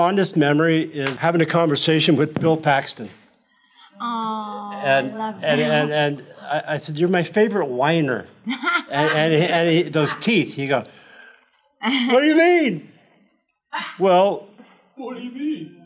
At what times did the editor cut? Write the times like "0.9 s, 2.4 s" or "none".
1.1 s